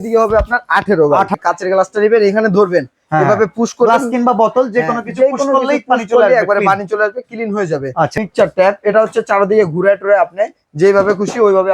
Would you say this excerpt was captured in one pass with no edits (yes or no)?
no